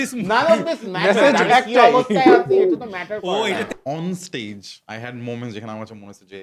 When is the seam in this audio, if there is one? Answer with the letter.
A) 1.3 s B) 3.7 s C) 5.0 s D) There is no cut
B